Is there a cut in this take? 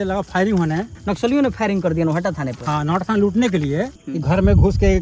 yes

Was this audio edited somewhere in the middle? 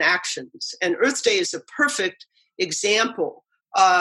no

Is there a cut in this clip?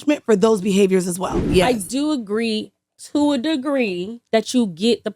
yes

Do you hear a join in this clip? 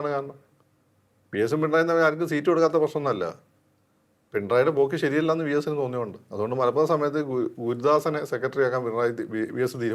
no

